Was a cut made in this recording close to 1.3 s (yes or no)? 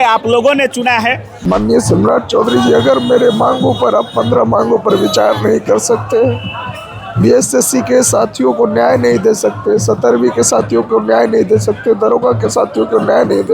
yes